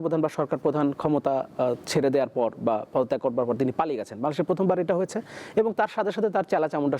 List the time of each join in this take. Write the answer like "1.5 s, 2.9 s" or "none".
none